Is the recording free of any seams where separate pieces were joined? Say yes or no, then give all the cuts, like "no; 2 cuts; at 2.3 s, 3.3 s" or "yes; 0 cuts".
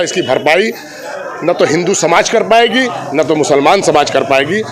yes; 0 cuts